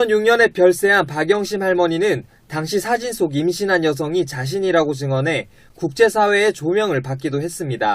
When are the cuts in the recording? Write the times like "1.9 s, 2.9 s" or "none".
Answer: 0.9 s